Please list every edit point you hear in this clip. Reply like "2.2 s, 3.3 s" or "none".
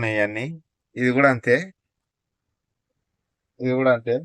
none